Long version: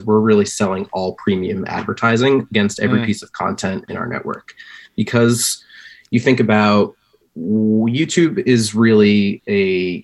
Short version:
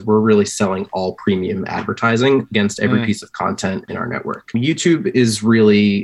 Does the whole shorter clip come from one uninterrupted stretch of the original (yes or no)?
no